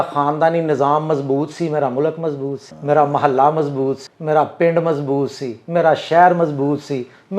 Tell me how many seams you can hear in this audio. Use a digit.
2